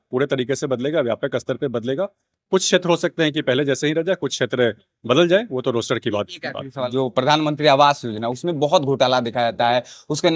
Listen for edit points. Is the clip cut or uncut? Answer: cut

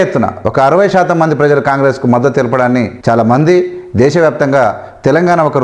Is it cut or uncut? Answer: cut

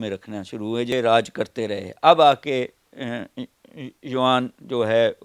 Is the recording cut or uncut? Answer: cut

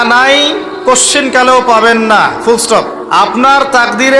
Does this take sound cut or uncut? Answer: cut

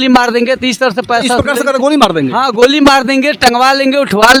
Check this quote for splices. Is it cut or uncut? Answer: uncut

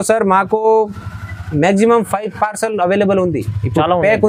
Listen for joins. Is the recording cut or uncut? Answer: uncut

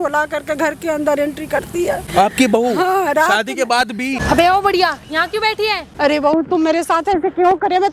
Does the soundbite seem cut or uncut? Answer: cut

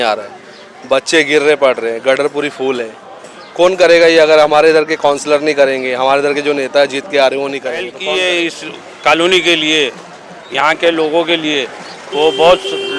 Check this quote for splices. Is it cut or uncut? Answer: cut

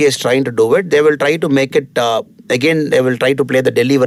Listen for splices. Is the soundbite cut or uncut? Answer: uncut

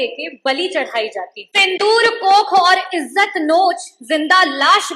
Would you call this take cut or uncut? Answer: cut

